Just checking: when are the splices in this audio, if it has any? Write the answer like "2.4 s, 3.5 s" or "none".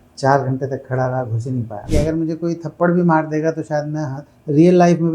1.9 s